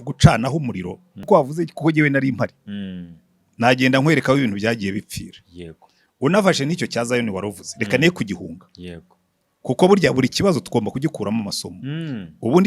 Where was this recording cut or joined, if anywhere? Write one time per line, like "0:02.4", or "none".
0:01.3